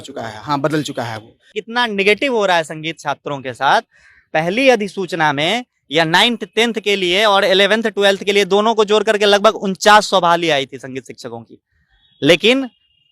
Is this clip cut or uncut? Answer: cut